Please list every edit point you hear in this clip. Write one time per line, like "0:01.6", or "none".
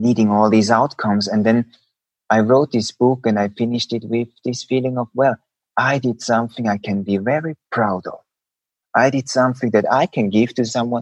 none